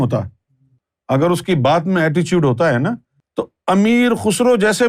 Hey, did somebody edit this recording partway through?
yes; 1 cut; at 0.9 s

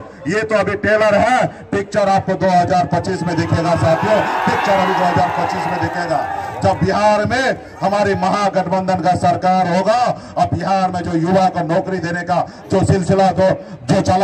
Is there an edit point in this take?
no; 0 cuts

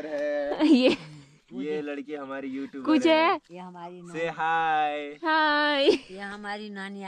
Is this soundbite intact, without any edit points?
yes; 0 cuts

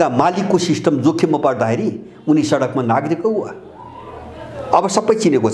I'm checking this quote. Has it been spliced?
no; 0 cuts

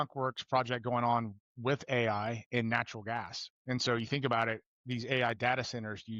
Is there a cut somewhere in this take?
no; 0 cuts

